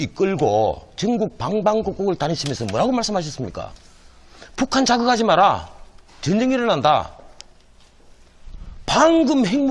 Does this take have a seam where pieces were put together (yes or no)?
no